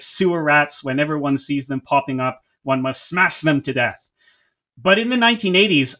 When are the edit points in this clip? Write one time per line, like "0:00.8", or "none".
none